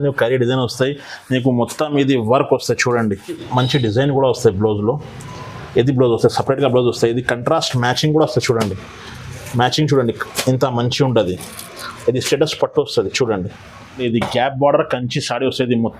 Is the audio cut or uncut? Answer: cut